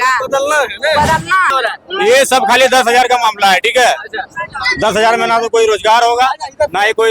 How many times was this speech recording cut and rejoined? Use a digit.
1